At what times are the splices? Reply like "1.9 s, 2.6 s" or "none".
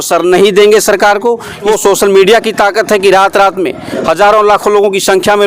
1.6 s